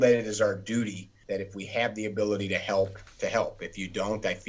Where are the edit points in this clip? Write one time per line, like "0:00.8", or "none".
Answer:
0:01.1
0:03.0